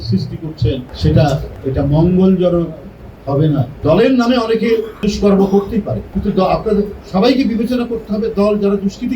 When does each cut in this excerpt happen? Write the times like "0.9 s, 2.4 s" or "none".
0.9 s, 1.5 s, 3.7 s, 4.9 s, 6.0 s